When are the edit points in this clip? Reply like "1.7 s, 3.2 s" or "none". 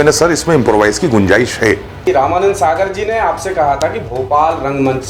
2.1 s